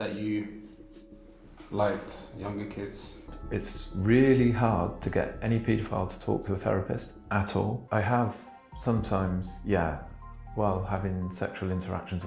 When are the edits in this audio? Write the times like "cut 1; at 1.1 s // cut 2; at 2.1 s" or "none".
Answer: cut 1; at 3.3 s // cut 2; at 7.8 s

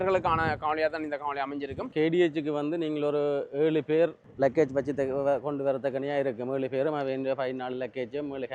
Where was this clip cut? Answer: cut 1; at 1.9 s // cut 2; at 4.2 s

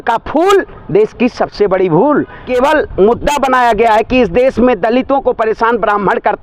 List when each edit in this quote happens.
cut 1; at 2.4 s

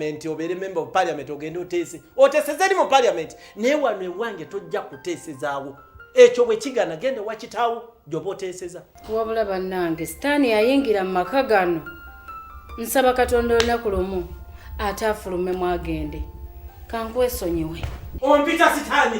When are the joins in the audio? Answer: cut 1; at 8.9 s

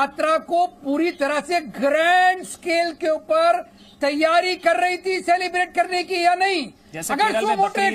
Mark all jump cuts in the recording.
none

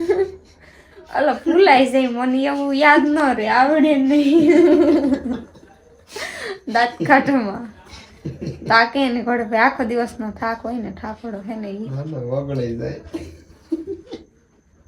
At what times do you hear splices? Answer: none

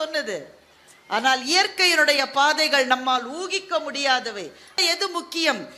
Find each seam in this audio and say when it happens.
cut 1; at 4.8 s

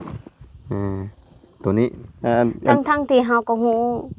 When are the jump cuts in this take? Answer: cut 1; at 2.1 s

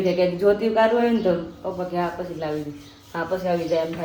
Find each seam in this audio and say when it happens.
none

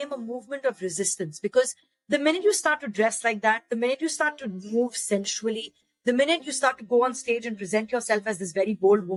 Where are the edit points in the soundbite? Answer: none

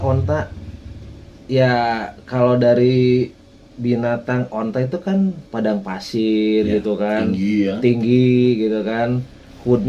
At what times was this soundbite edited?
none

